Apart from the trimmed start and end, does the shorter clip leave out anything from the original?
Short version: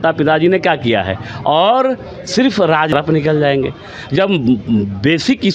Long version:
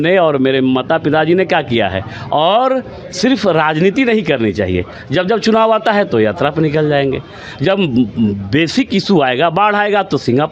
yes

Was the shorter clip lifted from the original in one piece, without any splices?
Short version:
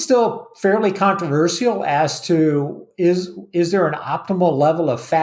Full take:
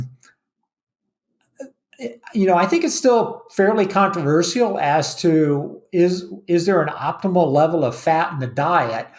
yes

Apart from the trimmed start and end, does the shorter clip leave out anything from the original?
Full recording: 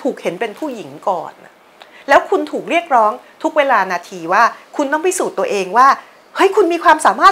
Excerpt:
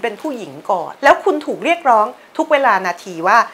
yes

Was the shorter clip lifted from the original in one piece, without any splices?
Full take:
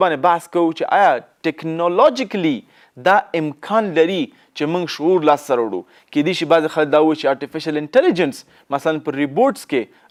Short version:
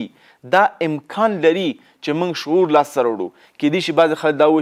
yes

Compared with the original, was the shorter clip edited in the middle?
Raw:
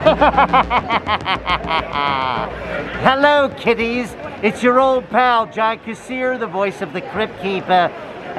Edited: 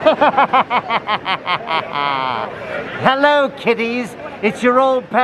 no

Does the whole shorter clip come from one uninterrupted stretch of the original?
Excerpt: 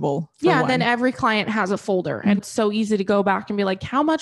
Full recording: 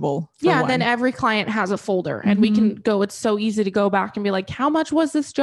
no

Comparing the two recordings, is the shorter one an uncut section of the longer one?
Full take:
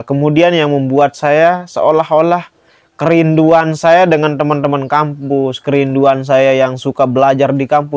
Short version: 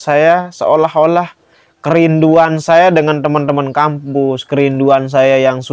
yes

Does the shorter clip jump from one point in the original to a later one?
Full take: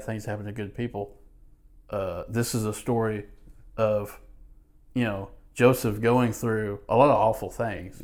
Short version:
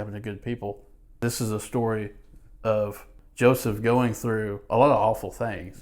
yes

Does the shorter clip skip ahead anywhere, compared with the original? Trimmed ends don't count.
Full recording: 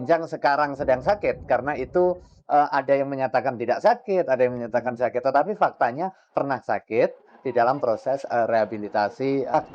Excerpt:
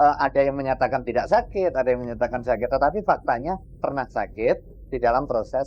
no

